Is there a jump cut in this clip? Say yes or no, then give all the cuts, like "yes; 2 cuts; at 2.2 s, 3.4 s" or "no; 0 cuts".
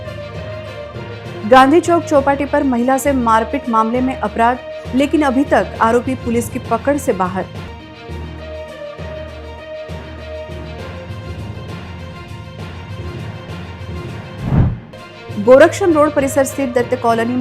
yes; 1 cut; at 1.2 s